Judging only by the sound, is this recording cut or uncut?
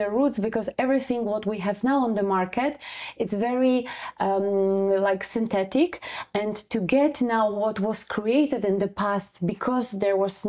uncut